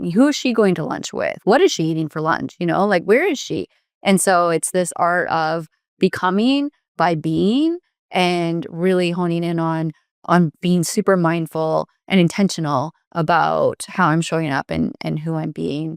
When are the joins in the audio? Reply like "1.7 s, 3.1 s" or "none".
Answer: none